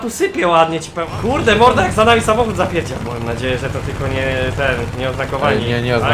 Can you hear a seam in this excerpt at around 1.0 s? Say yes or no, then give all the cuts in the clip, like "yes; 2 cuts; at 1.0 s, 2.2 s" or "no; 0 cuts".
yes; 1 cut; at 1.0 s